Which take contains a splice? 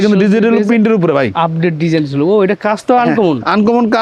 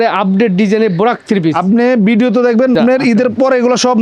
second; 1 cut; at 2.7 s

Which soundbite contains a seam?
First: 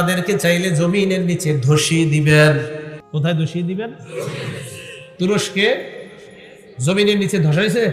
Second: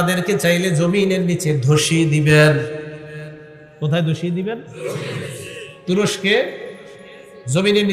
first; 1 cut; at 3.0 s

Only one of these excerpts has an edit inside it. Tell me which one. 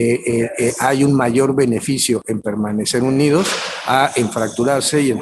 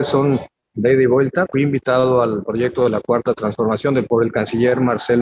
second; 2 cuts; at 1.5 s, 4.1 s

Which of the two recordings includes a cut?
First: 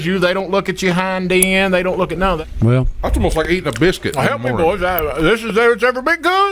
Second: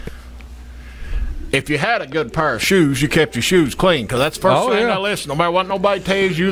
first; 1 cut; at 2.4 s

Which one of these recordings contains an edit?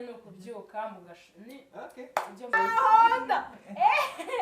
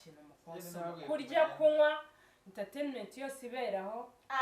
first; 1 cut; at 2.5 s

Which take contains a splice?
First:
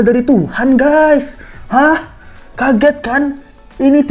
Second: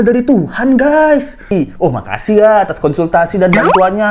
second; 1 cut; at 1.5 s

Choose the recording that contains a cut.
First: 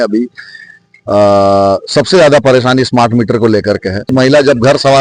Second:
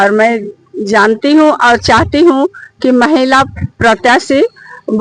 first; 1 cut; at 4.1 s

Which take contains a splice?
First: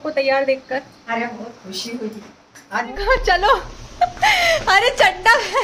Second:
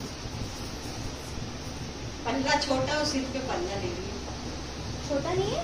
first; 1 cut; at 2.9 s

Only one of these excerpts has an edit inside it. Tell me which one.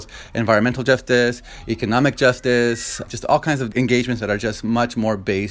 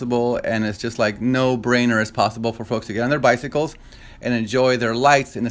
first; 1 cut; at 3.1 s

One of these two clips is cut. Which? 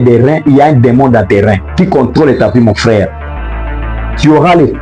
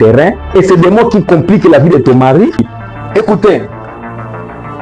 second; 1 cut; at 2.8 s

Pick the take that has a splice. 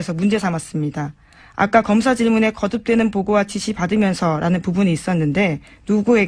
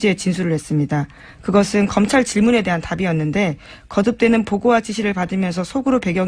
second; 1 cut; at 1.8 s

